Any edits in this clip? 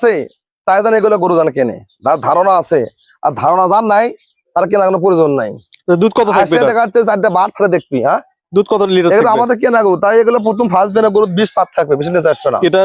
no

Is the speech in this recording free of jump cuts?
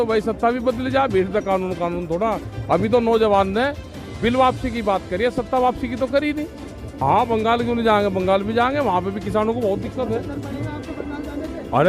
no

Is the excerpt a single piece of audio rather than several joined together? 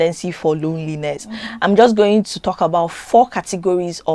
yes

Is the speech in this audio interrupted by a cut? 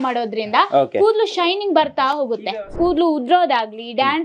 yes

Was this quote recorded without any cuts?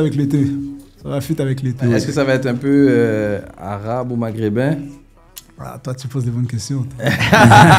no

